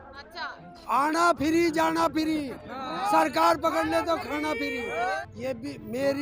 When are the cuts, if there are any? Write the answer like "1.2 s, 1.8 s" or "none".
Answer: 5.1 s